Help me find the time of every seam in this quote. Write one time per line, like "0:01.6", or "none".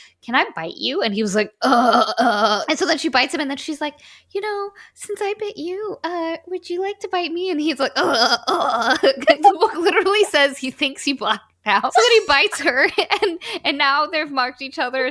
0:02.6
0:09.3
0:11.9